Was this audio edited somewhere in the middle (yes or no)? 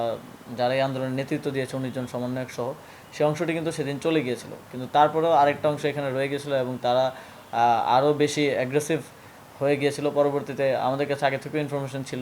no